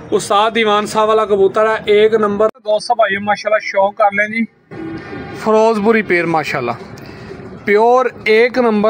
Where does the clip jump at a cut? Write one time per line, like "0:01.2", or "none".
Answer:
0:02.5